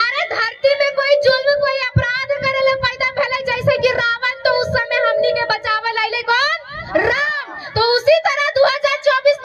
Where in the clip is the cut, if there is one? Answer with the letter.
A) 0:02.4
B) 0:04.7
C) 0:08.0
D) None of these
D